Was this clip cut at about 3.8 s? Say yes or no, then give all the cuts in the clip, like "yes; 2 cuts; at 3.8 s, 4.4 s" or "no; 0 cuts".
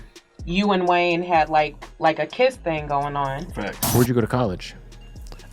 yes; 1 cut; at 3.8 s